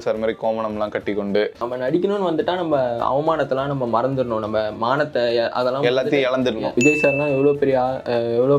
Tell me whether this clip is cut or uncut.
cut